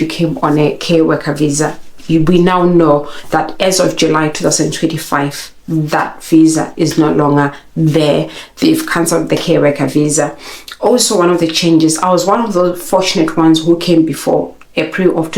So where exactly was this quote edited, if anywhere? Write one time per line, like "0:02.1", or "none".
none